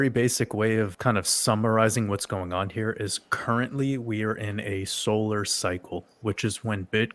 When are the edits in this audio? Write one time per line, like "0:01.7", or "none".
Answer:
0:00.9